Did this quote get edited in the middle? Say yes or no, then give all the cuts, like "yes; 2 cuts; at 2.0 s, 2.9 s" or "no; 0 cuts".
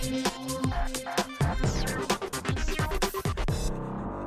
yes; 1 cut; at 1.0 s